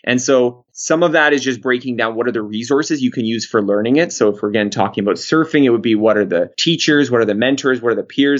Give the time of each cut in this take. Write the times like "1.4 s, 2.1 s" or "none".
none